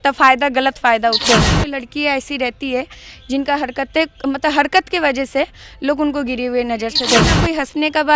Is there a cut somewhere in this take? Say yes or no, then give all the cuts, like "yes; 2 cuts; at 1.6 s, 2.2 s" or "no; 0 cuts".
yes; 2 cuts; at 1.5 s, 7.3 s